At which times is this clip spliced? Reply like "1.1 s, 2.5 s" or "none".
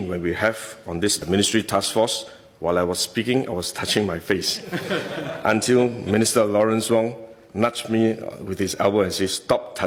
none